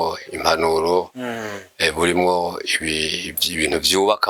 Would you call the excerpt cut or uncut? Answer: uncut